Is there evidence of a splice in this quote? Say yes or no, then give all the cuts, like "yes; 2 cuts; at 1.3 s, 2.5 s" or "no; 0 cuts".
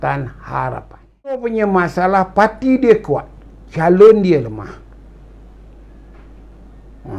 yes; 1 cut; at 1.4 s